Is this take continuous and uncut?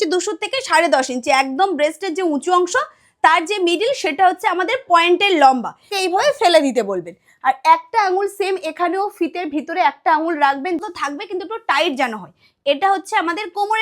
no; 2 cuts; at 5.9 s, 10.8 s

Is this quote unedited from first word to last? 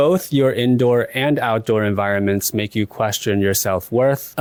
yes; 0 cuts

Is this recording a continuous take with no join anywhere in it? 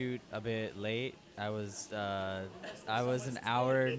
yes; 0 cuts

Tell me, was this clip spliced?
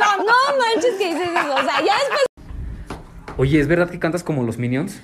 yes; 1 cut; at 2.5 s

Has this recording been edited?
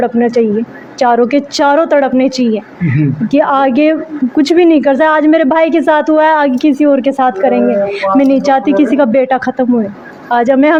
no; 0 cuts

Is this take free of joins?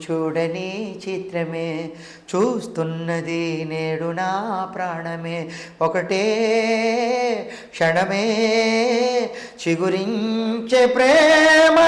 yes; 0 cuts

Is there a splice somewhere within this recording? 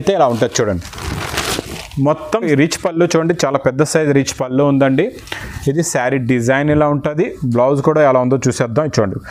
yes; 1 cut; at 2.5 s

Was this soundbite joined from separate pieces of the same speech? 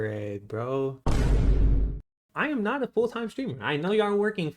yes; 1 cut; at 2.3 s

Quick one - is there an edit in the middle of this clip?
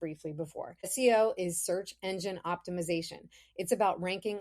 yes; 1 cut; at 0.9 s

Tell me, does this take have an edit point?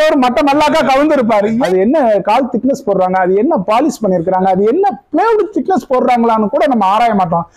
yes; 1 cut; at 1.6 s

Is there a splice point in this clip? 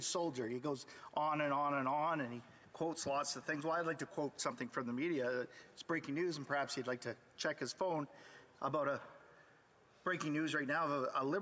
yes; 1 cut; at 8.9 s

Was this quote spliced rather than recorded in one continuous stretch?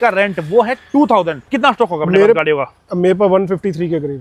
yes; 1 cut; at 1.4 s

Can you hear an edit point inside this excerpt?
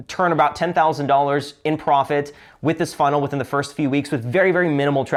no; 0 cuts

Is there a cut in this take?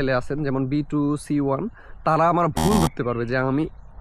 no; 0 cuts

